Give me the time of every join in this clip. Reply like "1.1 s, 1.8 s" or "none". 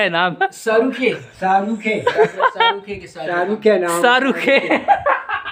none